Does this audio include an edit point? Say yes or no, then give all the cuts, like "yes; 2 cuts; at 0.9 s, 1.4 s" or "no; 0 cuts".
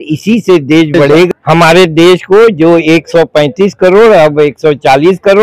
yes; 1 cut; at 1.3 s